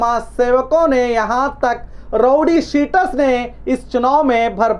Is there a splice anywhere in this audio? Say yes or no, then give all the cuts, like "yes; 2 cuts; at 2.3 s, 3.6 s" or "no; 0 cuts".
no; 0 cuts